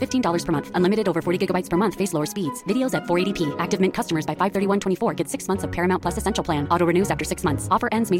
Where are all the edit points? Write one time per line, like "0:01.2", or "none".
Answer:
none